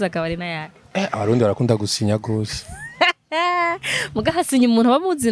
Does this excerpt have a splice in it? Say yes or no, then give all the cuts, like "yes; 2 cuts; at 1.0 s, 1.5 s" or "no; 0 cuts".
no; 0 cuts